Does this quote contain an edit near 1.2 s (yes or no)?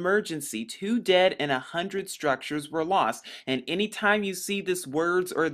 yes